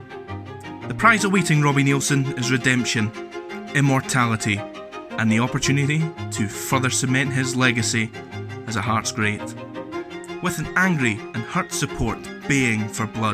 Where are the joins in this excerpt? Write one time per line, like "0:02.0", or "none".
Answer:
0:01.0